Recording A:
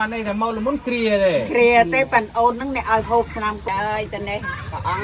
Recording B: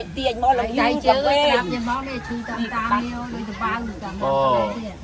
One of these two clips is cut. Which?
A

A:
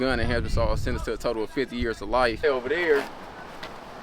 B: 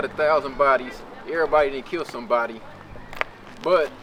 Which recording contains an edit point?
A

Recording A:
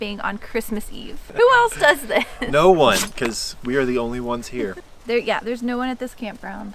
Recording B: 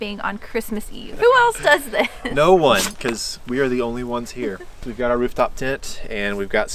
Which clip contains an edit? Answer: B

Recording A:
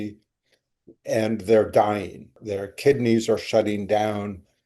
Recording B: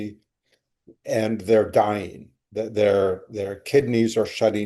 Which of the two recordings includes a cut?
A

